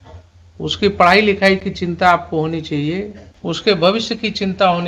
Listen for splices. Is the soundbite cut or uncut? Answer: cut